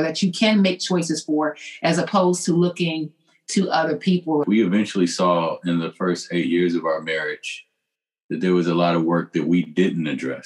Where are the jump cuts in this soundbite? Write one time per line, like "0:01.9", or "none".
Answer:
0:04.5